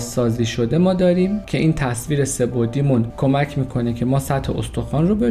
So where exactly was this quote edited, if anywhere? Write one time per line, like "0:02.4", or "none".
0:01.5
0:03.1